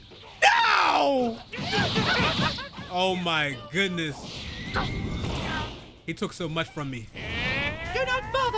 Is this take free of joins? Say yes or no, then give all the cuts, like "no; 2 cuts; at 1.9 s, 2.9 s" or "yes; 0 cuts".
yes; 0 cuts